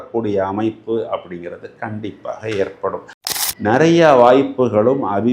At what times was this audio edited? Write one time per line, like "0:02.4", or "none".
0:03.2